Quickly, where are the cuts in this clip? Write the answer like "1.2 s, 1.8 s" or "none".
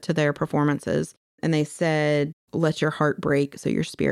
1.4 s, 2.4 s